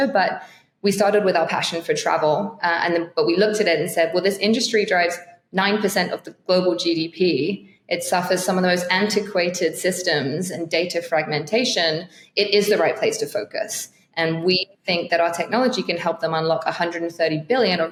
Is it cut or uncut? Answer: uncut